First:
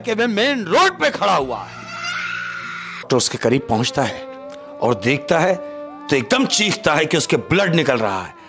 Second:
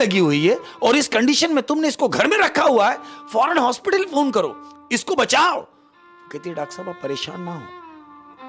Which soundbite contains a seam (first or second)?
first